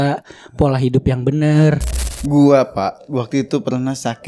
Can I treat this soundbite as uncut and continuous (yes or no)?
no